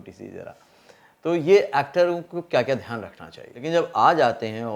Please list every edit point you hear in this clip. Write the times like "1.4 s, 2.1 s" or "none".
3.6 s

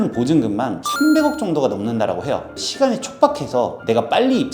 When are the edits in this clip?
2.5 s

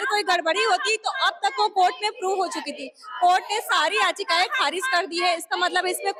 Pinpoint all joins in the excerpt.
none

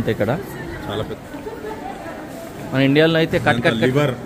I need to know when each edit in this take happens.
1.1 s

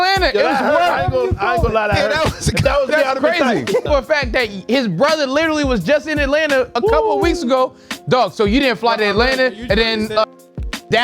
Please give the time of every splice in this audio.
3.8 s

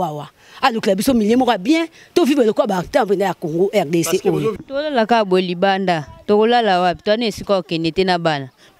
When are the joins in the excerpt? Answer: 4.6 s

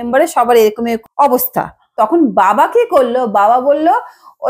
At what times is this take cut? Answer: 1.0 s, 1.8 s

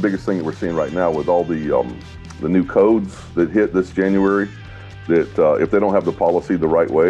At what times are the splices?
none

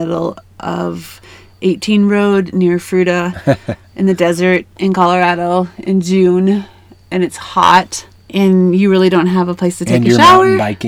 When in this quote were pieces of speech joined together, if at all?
none

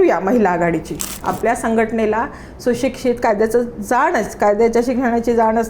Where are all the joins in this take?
1.2 s

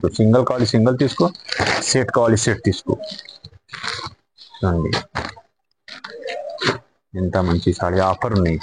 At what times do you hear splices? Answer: none

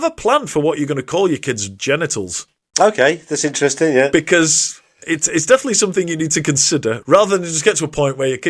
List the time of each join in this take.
5.1 s, 7.0 s

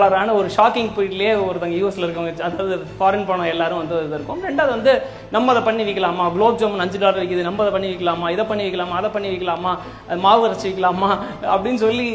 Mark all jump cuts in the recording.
none

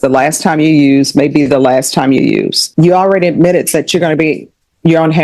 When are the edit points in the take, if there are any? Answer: 2.6 s

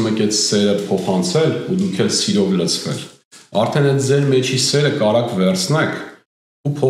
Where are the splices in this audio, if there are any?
none

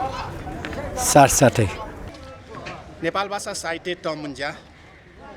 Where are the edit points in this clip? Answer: 2.0 s

